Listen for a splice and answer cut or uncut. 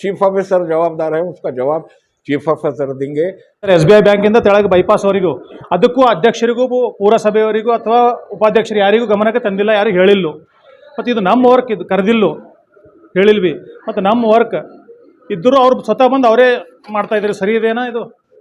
cut